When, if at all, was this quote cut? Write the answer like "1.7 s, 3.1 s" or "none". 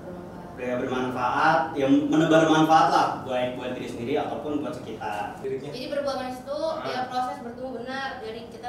5.4 s